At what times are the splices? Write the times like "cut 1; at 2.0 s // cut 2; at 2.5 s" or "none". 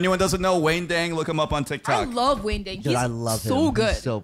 none